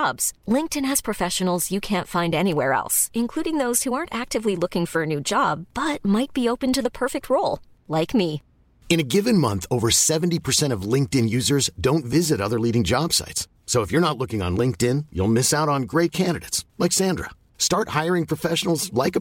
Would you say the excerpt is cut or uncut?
uncut